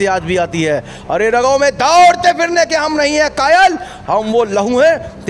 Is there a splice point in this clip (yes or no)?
no